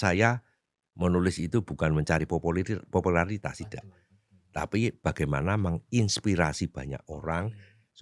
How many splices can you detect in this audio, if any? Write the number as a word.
zero